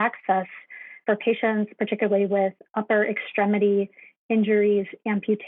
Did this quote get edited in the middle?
yes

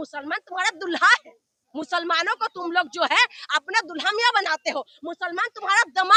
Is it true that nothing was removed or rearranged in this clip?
yes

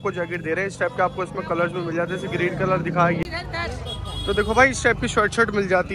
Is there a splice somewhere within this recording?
yes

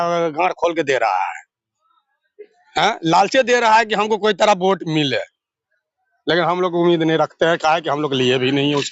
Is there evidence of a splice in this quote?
no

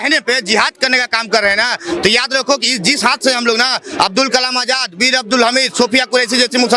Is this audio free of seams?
yes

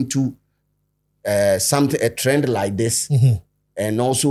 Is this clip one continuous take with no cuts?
yes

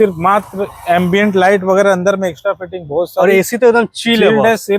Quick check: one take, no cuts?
yes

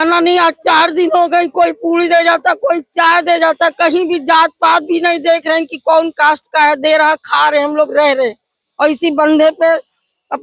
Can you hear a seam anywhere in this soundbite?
no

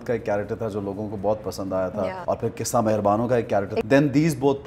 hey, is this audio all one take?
no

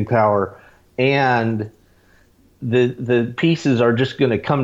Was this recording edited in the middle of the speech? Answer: no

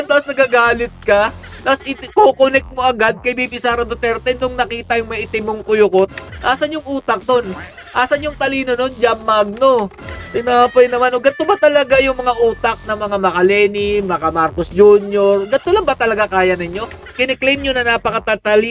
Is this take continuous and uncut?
yes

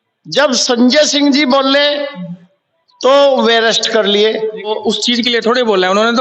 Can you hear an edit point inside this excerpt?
yes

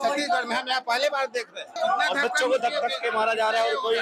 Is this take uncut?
no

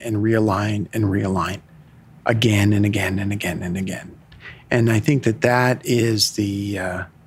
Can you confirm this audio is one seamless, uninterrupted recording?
yes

